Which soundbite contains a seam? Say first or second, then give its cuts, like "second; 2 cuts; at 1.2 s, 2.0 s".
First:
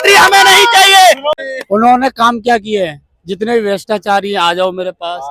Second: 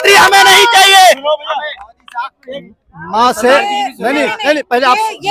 first; 1 cut; at 1.4 s